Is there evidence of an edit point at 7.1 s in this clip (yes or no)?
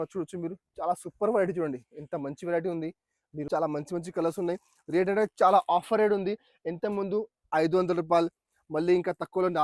no